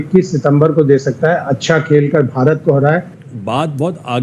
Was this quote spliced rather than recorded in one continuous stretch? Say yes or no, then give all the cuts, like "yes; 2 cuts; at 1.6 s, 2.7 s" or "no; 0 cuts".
yes; 1 cut; at 3.2 s